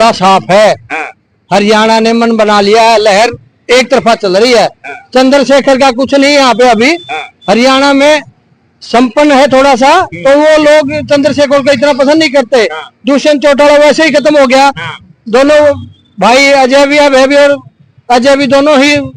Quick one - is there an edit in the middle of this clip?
no; 0 cuts

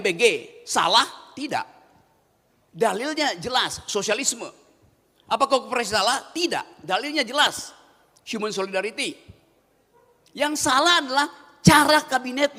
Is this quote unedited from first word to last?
yes; 0 cuts

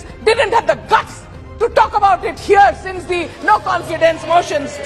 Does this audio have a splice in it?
no; 0 cuts

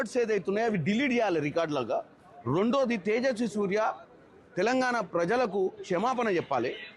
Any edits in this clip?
yes; 1 cut; at 1.3 s

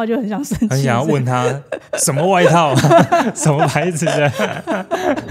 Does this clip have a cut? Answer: no; 0 cuts

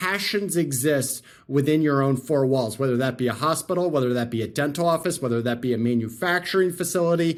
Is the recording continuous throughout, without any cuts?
yes; 0 cuts

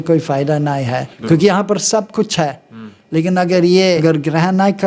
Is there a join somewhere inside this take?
yes; 2 cuts; at 1.1 s, 4.0 s

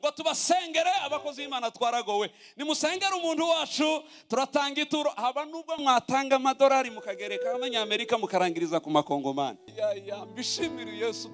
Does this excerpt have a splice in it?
yes; 1 cut; at 9.7 s

